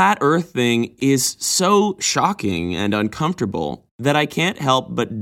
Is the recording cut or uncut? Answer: cut